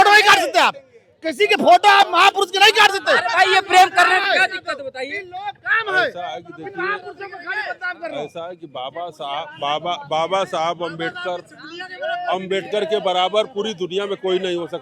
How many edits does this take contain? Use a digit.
0